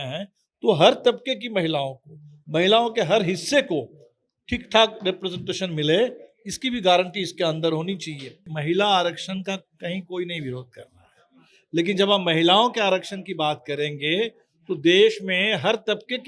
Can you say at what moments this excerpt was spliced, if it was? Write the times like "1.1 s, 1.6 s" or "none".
8.6 s